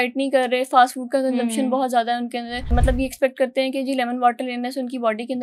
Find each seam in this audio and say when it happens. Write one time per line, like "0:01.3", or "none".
0:02.7